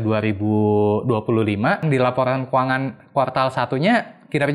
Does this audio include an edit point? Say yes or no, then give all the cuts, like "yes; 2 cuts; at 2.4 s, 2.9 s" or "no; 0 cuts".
yes; 1 cut; at 1.8 s